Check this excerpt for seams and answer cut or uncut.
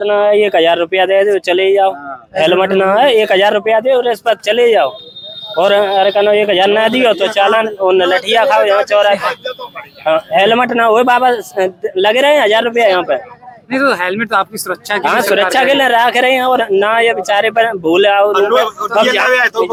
uncut